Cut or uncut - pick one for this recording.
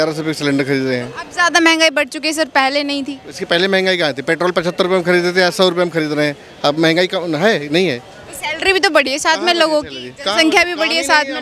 uncut